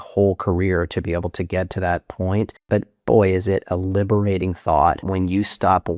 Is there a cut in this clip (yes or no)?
yes